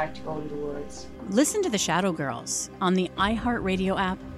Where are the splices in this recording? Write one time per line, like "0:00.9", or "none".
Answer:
0:01.1